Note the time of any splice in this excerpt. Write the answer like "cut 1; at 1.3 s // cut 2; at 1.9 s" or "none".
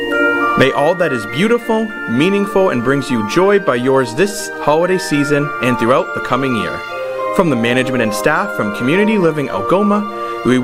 none

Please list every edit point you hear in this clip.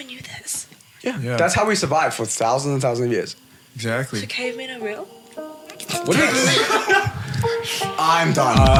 none

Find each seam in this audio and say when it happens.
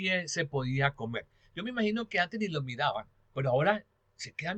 none

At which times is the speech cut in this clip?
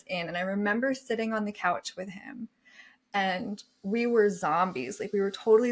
none

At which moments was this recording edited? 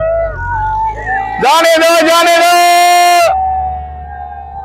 none

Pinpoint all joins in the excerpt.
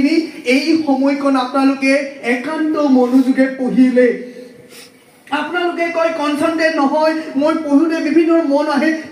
none

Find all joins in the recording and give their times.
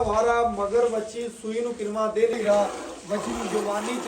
cut 1; at 2.3 s

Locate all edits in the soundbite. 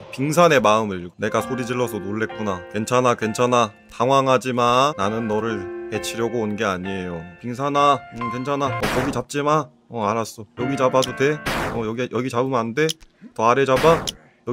cut 1; at 1.1 s // cut 2; at 7.4 s // cut 3; at 10.4 s

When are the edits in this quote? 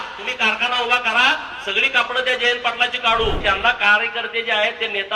cut 1; at 3.4 s

